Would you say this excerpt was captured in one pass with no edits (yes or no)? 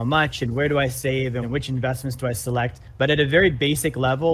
no